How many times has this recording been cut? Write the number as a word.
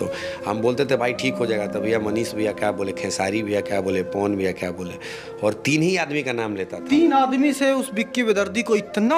zero